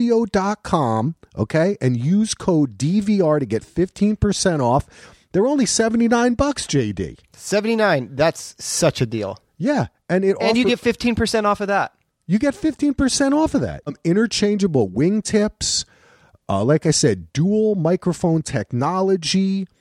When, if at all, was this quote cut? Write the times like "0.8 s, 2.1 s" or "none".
13.9 s

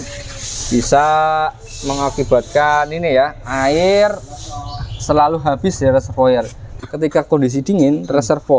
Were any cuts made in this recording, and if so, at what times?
6.7 s

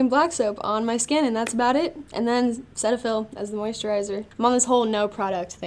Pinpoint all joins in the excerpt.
none

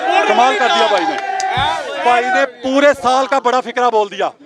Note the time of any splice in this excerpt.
1.9 s

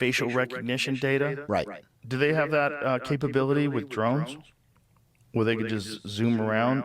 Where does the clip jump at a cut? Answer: none

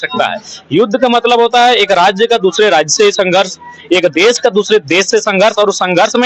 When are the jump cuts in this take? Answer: none

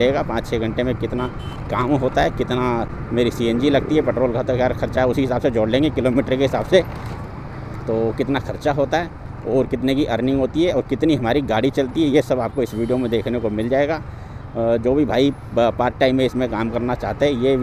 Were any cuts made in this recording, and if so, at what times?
none

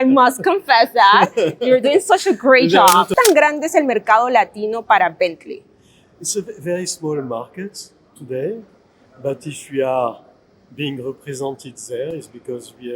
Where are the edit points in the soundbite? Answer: 3.1 s

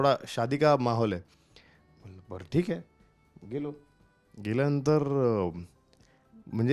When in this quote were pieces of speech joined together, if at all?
none

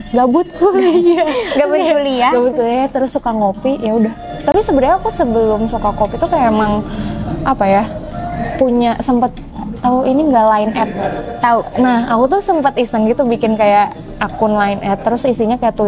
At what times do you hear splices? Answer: none

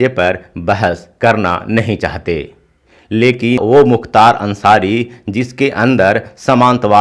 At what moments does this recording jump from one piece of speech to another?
3.6 s

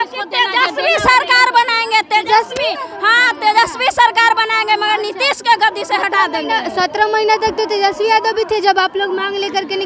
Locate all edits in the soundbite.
none

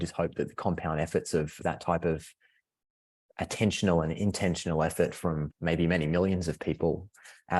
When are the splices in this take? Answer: none

